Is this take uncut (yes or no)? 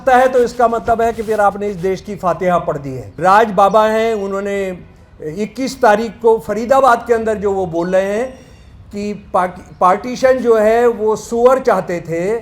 no